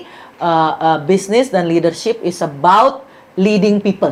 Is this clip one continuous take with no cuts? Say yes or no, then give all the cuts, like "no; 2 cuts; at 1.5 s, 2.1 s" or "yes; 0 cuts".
yes; 0 cuts